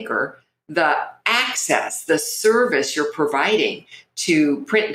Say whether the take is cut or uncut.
uncut